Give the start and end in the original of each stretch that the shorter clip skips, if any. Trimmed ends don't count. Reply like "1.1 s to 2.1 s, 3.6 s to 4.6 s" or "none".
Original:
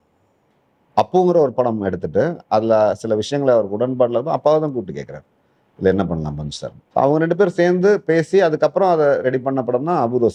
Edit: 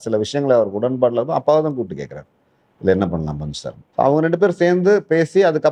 none